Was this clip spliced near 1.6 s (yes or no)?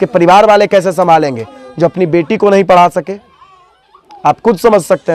no